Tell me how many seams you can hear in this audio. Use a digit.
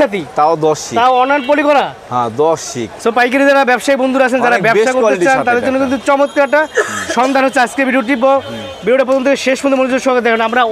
0